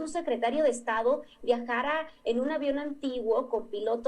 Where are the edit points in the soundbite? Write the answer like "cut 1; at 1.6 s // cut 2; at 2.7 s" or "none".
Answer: none